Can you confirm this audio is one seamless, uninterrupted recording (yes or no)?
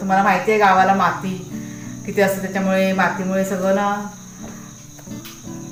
yes